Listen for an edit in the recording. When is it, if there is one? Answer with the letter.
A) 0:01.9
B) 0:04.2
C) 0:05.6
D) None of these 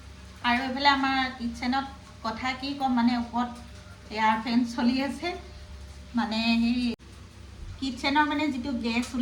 D